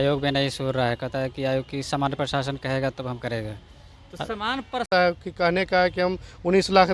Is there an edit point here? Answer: yes; 1 cut; at 4.9 s

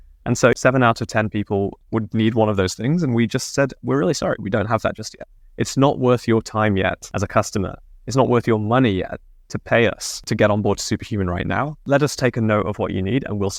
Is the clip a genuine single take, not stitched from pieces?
yes; 0 cuts

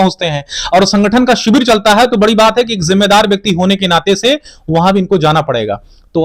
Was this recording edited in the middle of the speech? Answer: no; 0 cuts

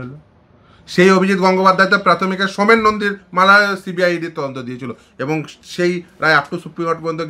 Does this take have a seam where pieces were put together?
no; 0 cuts

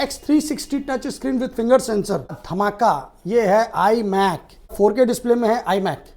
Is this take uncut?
no; 2 cuts; at 2.4 s, 4.7 s

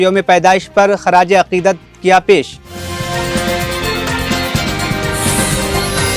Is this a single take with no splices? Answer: yes; 0 cuts

